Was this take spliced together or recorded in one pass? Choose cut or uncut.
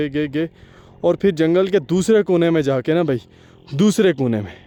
uncut